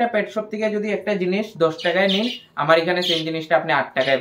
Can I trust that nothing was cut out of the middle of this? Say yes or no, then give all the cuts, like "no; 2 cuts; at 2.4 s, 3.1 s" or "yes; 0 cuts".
yes; 0 cuts